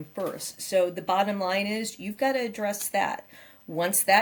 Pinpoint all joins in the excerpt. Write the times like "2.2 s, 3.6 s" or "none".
none